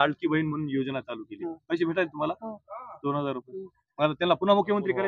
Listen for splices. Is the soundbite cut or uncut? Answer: uncut